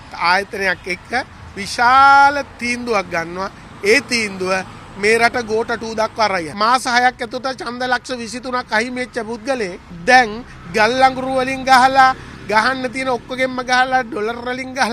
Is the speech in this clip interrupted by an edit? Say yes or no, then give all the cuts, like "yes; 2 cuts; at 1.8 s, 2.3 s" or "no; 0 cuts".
yes; 2 cuts; at 6.5 s, 9.9 s